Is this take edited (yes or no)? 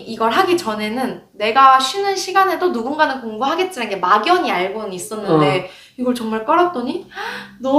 no